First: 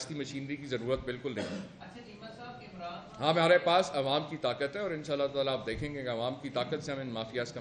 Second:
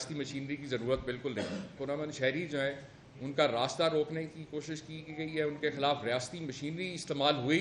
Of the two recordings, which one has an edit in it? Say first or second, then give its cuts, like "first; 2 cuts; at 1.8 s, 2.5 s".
second; 1 cut; at 1.7 s